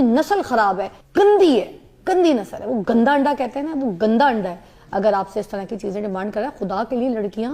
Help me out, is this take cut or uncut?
cut